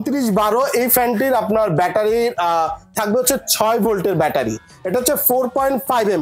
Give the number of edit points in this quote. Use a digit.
0